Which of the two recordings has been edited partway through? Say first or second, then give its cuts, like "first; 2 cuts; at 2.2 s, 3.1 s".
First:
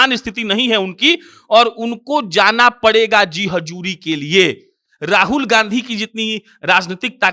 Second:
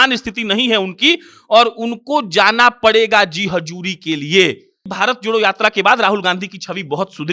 second; 1 cut; at 4.9 s